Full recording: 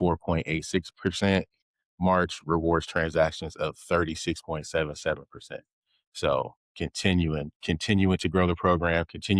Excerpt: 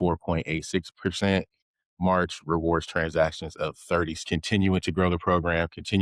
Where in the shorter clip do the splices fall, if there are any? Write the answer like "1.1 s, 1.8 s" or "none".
4.2 s